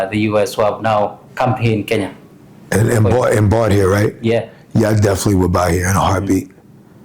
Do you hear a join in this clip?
no; 0 cuts

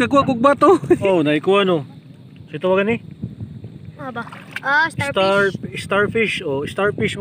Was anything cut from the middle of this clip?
yes; 1 cut; at 1.0 s

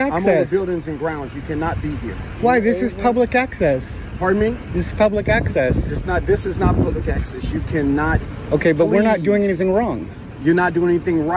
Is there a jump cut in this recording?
yes; 1 cut; at 8.2 s

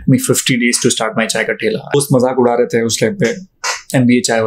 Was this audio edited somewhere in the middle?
yes; 1 cut; at 1.9 s

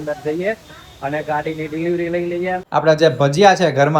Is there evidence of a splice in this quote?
yes; 1 cut; at 2.6 s

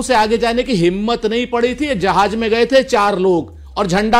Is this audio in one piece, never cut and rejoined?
yes; 0 cuts

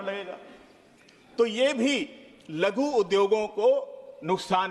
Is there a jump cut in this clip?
no; 0 cuts

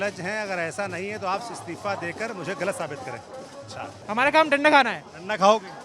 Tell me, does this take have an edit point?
yes; 1 cut; at 4.0 s

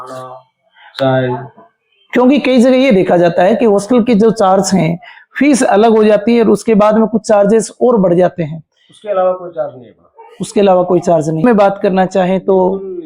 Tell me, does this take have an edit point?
yes; 1 cut; at 11.4 s

